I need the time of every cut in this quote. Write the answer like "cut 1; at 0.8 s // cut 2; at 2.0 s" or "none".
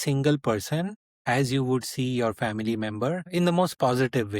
cut 1; at 3.3 s